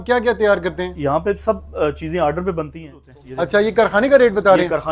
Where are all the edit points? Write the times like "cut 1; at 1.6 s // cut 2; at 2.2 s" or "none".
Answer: cut 1; at 3.0 s